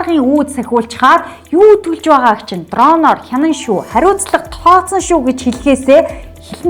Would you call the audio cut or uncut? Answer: uncut